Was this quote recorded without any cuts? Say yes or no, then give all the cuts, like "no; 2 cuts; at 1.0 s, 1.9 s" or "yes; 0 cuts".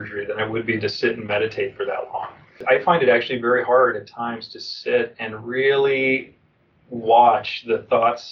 no; 1 cut; at 2.6 s